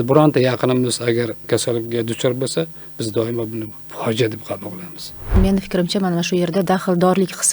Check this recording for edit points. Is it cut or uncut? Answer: cut